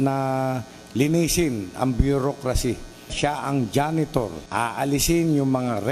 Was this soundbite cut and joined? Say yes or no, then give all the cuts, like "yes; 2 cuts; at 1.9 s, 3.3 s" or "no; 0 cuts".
yes; 2 cuts; at 3.1 s, 4.4 s